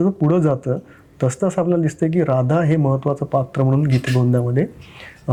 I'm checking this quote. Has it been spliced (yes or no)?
no